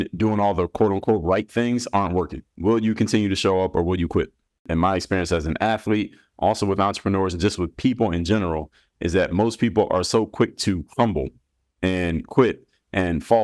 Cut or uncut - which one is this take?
cut